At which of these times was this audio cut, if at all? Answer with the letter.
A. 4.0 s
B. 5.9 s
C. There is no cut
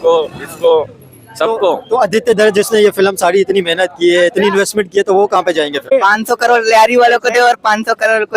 B